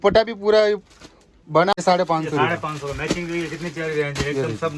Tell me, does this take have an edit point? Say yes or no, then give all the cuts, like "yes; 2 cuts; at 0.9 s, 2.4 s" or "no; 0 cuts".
yes; 1 cut; at 1.7 s